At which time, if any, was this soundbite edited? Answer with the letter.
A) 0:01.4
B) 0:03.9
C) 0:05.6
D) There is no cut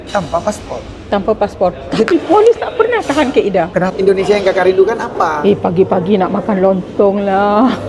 B